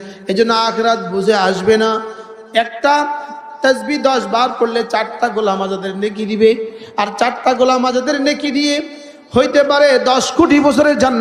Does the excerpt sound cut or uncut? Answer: uncut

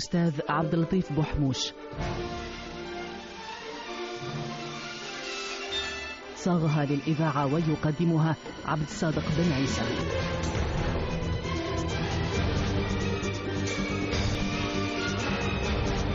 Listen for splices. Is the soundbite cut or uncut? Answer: cut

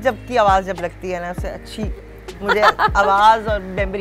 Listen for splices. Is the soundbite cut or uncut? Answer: uncut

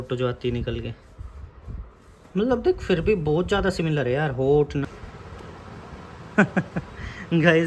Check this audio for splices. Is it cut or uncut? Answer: cut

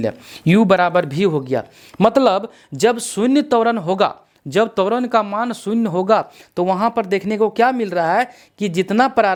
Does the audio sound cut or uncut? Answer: uncut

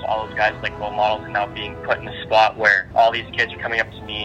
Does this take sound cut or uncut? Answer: cut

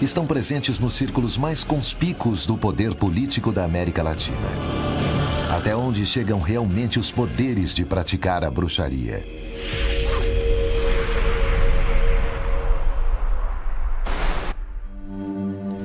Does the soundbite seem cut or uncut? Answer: cut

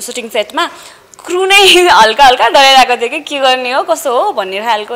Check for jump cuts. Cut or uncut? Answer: uncut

